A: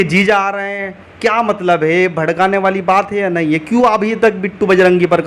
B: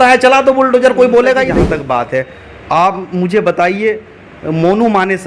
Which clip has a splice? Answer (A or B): B